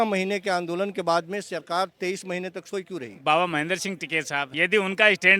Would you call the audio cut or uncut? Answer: cut